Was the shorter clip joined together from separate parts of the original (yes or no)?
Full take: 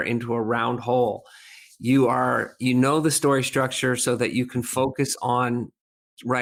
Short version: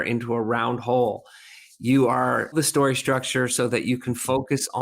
yes